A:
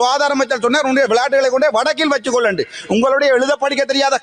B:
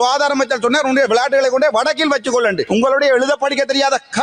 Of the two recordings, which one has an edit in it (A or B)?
B